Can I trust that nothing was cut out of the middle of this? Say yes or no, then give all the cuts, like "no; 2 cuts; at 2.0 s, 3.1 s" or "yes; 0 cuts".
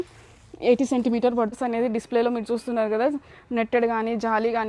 no; 1 cut; at 1.5 s